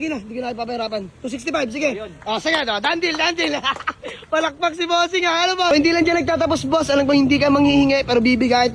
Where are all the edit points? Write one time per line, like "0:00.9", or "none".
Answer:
0:05.7